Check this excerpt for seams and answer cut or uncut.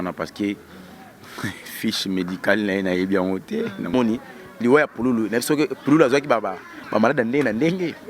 cut